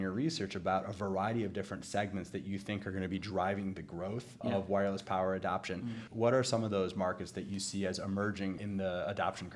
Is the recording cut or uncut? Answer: cut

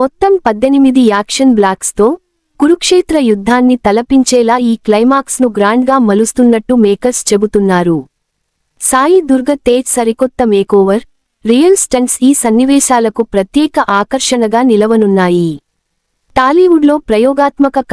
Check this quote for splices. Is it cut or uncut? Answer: cut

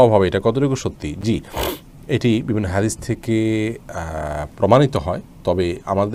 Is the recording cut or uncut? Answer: uncut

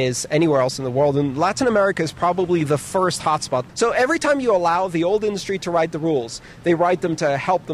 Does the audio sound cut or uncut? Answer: cut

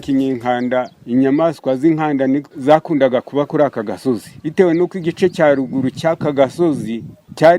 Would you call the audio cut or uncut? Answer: cut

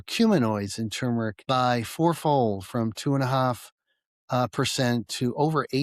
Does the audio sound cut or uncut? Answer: uncut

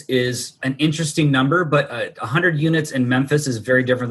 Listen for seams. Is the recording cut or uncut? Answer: uncut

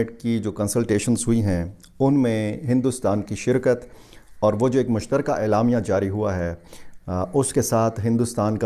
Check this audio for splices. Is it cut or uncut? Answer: uncut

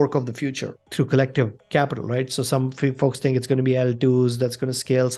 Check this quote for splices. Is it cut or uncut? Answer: uncut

